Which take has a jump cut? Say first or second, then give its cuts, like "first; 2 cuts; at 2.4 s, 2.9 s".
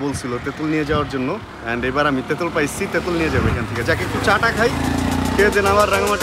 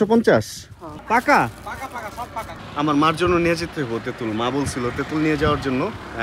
second; 2 cuts; at 0.9 s, 2.5 s